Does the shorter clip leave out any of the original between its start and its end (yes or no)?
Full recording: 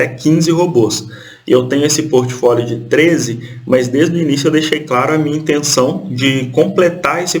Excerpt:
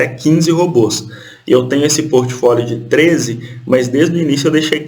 no